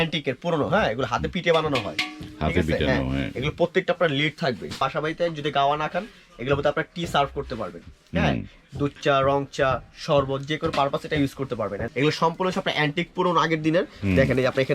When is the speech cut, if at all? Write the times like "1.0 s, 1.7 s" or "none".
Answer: 4.8 s, 11.9 s